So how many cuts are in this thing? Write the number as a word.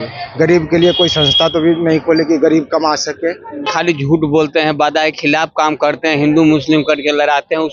one